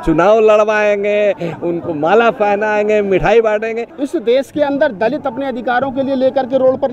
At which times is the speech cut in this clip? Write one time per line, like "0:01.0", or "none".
0:03.9